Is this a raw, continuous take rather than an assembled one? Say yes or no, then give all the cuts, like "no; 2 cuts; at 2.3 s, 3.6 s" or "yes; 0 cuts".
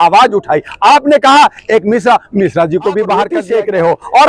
no; 1 cut; at 3.4 s